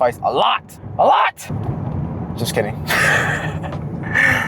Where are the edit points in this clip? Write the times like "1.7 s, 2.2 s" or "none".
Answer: 1.5 s